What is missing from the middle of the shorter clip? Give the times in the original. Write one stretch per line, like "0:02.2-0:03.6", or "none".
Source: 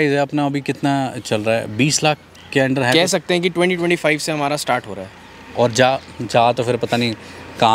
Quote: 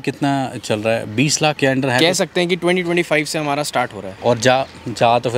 0:02.2-0:02.5
0:05.0-0:05.4